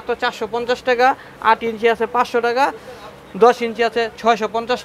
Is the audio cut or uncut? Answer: uncut